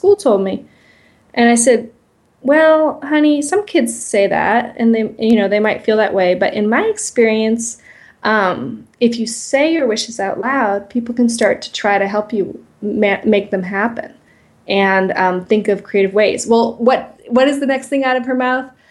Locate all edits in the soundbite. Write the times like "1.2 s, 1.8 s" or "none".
none